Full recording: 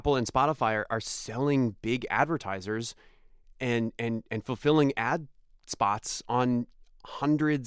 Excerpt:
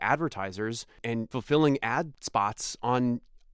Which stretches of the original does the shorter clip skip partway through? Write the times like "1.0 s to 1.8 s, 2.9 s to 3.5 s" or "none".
3.4 s to 4.4 s, 5.3 s to 5.6 s